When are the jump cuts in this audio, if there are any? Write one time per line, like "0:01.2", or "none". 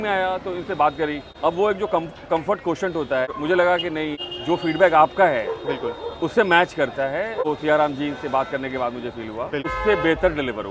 0:01.3
0:03.3
0:04.2
0:07.4
0:09.7